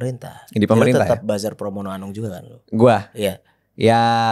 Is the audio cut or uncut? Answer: uncut